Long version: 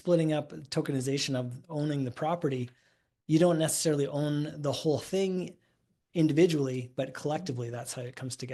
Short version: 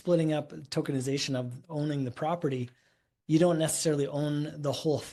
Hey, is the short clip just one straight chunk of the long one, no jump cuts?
yes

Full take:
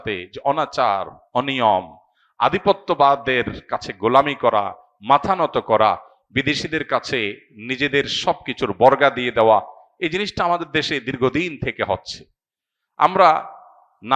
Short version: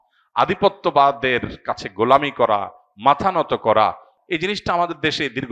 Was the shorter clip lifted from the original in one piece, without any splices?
no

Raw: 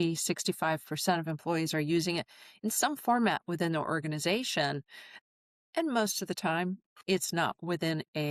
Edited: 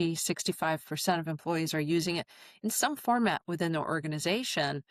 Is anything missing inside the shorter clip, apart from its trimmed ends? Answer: no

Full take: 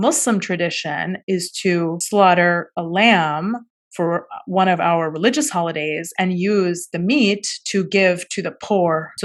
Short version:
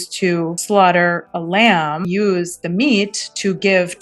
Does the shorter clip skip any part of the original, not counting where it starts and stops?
yes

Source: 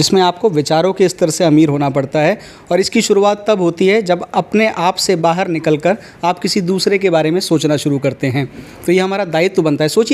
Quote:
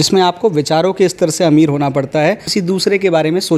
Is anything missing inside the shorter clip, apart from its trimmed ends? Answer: yes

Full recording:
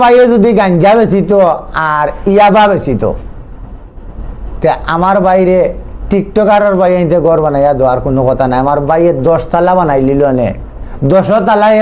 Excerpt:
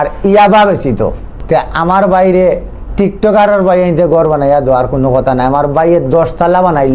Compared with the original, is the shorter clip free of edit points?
no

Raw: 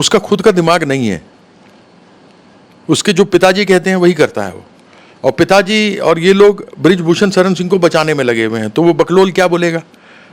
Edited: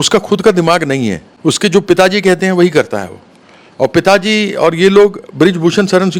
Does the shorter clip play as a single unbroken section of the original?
no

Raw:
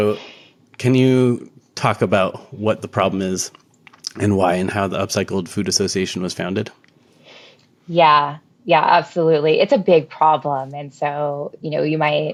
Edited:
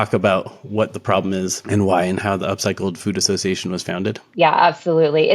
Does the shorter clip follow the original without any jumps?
no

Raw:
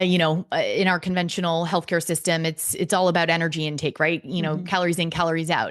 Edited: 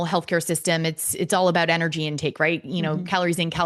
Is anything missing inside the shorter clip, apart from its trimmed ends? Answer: no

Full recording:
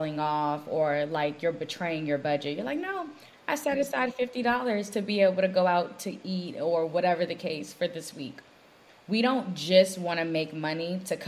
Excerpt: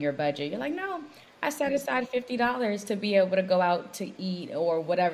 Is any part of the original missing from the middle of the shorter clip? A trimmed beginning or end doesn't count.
no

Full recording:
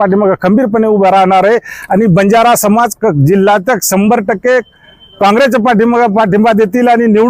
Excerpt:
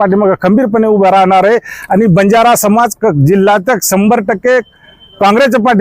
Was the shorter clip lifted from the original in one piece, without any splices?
yes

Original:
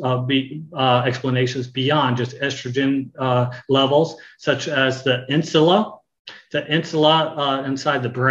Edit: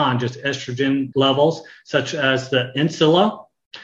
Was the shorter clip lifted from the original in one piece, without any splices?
no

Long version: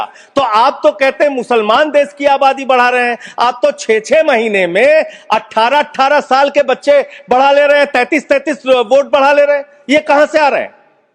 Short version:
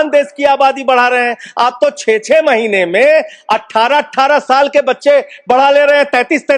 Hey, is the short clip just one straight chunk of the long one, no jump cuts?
yes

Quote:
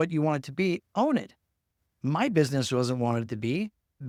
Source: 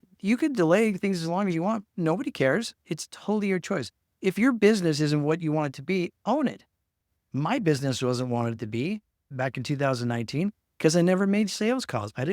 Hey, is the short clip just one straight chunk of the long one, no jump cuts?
yes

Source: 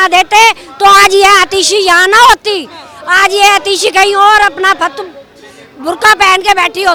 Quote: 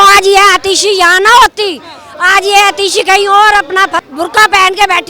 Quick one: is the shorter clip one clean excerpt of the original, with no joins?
no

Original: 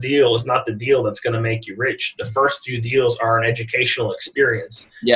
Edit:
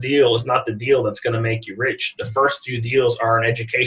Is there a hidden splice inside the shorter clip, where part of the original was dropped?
no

